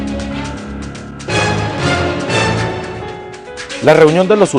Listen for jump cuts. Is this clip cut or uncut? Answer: cut